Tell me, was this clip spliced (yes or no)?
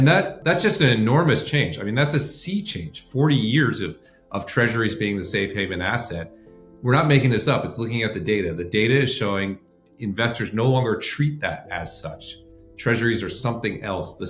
no